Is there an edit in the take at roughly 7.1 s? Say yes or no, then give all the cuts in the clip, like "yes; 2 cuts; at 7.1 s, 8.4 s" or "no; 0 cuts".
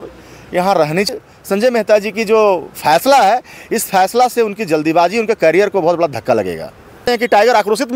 yes; 2 cuts; at 1.1 s, 7.1 s